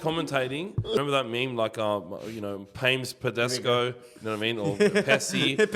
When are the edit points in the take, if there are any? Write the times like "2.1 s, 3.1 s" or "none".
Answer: 1.0 s